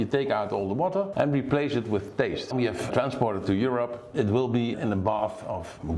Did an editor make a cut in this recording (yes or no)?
yes